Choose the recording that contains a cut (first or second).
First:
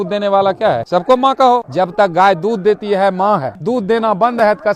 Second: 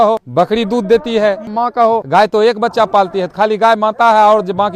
first